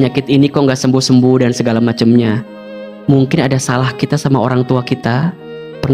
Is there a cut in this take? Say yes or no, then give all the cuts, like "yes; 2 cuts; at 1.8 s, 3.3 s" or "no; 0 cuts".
no; 0 cuts